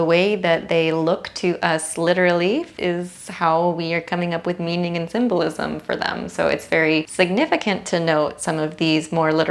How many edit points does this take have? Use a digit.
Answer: 2